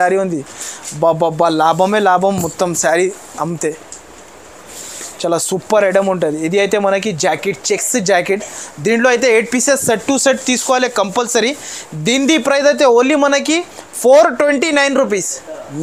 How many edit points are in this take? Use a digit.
0